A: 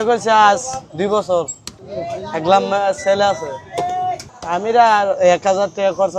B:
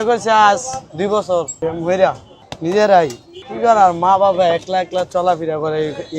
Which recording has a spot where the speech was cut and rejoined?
B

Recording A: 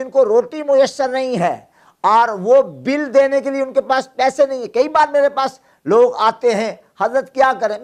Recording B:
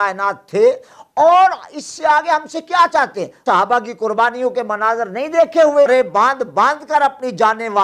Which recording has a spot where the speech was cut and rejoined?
B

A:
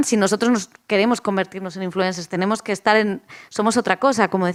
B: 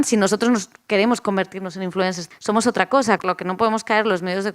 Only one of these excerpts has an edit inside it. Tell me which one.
B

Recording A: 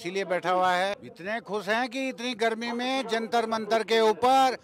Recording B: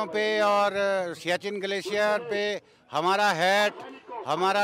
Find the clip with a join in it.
A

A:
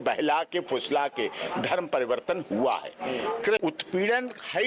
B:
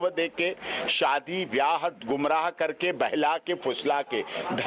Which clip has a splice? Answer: A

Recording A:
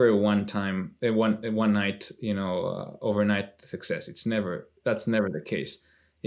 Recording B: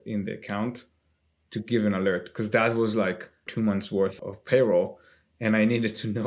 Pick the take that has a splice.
B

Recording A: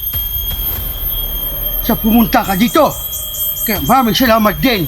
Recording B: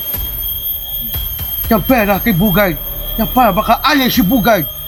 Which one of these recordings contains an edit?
A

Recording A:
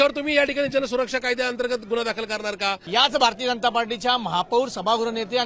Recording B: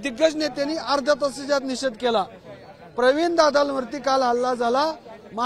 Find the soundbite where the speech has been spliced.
A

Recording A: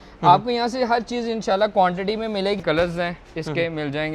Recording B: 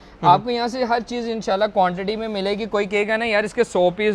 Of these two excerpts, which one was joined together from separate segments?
A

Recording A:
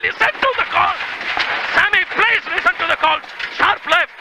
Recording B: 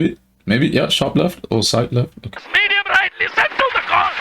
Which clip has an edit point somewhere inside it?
B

